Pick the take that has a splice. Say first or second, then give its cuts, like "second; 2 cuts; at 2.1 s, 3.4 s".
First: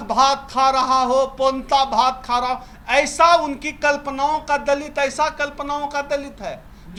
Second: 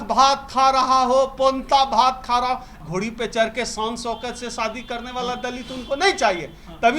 second; 1 cut; at 2.8 s